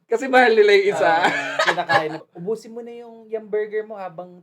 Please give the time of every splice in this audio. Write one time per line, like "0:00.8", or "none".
0:02.3

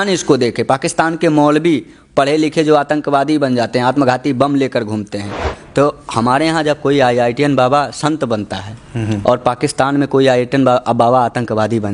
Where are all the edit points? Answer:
0:05.5

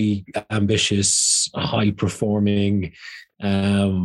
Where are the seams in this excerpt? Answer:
none

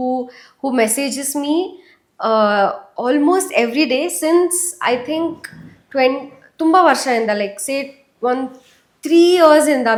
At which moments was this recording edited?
none

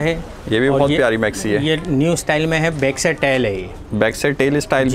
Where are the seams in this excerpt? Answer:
none

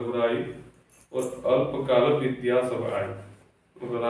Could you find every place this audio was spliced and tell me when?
none

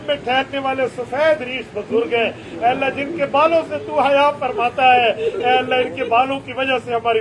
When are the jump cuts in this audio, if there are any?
none

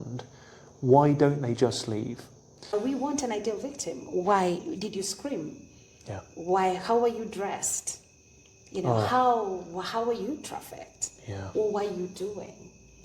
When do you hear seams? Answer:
0:02.7

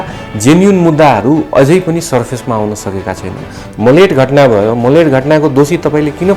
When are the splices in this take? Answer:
0:03.6

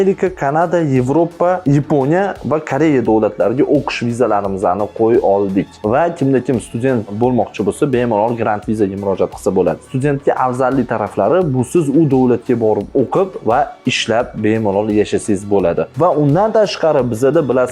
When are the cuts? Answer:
none

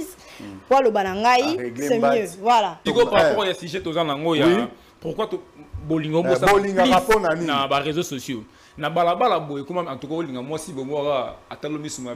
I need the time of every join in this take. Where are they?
0:02.9

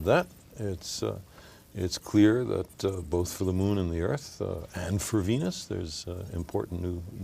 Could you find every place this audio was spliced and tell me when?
0:01.7

